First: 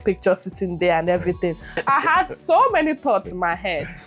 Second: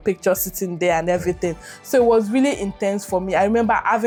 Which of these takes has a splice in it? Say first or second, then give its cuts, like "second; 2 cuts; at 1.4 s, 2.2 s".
first; 1 cut; at 1.7 s